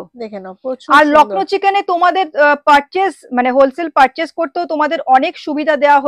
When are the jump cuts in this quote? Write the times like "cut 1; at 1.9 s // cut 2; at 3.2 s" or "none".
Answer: none